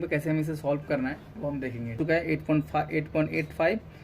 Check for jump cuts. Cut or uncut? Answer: cut